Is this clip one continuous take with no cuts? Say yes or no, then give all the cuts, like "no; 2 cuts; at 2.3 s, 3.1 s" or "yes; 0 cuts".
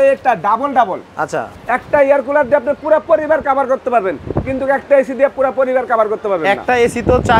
no; 1 cut; at 1.5 s